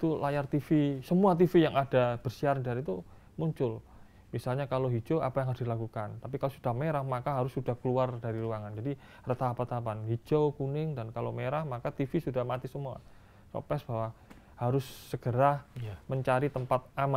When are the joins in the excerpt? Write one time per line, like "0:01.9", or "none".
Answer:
none